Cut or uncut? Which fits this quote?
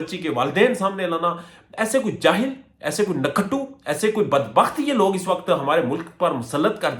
uncut